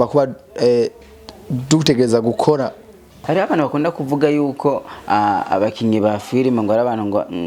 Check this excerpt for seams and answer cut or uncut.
cut